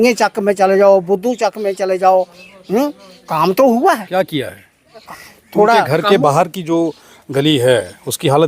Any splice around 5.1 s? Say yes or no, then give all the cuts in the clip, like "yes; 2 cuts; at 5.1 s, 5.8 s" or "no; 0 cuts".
yes; 1 cut; at 5.1 s